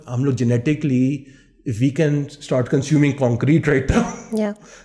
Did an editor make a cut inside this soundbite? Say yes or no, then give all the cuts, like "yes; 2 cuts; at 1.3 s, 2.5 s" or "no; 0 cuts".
no; 0 cuts